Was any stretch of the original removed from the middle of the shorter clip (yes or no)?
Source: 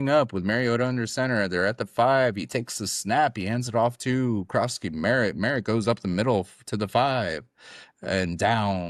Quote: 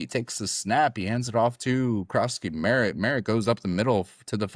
no